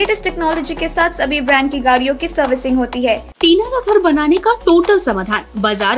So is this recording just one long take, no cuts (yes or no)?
no